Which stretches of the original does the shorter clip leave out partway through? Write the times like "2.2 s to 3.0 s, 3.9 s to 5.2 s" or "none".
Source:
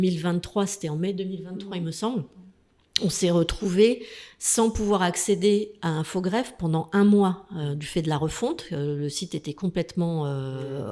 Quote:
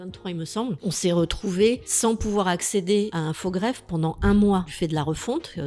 2.2 s to 3.0 s, 4.1 s to 4.4 s, 5.7 s to 5.9 s, 7.4 s to 7.9 s